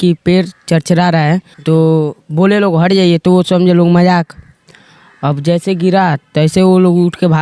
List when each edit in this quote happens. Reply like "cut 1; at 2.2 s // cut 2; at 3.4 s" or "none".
cut 1; at 1.5 s